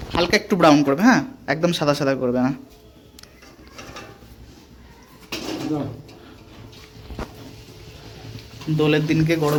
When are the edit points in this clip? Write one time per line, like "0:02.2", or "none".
none